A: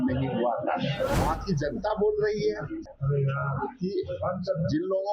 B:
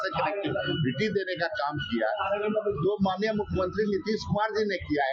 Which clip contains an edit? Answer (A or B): A